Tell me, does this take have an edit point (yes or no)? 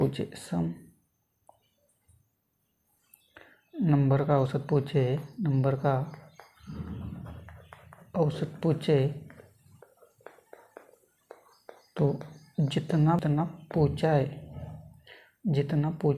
yes